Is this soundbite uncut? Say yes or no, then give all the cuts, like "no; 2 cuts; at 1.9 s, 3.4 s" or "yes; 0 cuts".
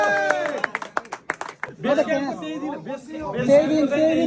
no; 1 cut; at 1.7 s